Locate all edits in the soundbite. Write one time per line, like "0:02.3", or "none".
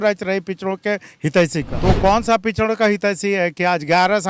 0:01.7